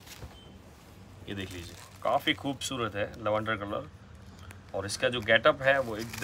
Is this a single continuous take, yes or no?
yes